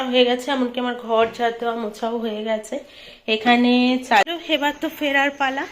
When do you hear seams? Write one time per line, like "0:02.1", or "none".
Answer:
0:04.2